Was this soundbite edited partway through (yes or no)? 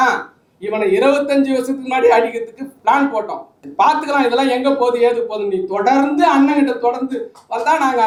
no